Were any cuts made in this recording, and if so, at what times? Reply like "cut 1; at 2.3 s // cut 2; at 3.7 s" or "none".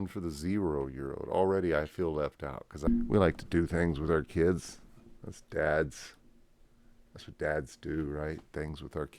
cut 1; at 2.9 s